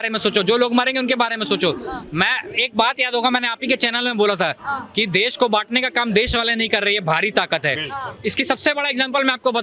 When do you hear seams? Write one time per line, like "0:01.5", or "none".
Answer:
none